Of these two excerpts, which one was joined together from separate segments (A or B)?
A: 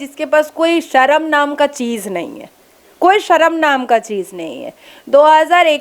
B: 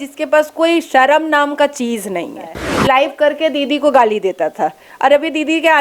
B